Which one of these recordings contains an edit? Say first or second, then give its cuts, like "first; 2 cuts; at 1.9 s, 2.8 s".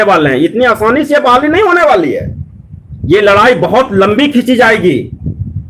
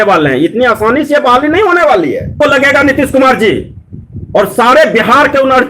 second; 1 cut; at 2.3 s